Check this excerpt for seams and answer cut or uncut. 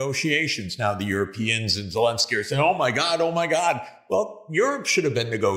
uncut